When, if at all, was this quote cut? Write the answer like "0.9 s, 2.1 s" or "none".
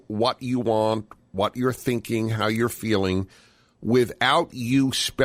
none